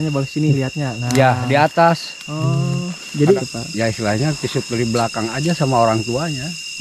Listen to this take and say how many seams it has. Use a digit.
1